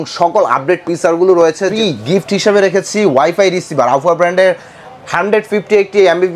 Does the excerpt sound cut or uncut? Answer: cut